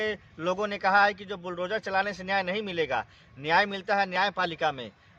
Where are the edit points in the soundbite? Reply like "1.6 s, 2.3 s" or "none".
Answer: none